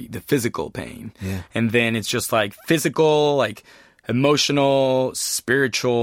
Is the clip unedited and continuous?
no; 1 cut; at 2.6 s

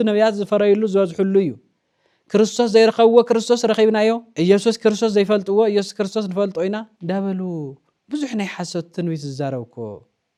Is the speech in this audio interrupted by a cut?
no; 0 cuts

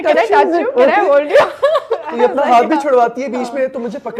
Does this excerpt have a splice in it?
no; 0 cuts

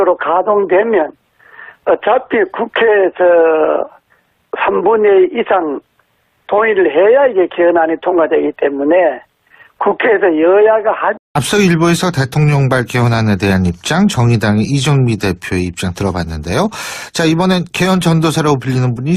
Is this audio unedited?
yes; 0 cuts

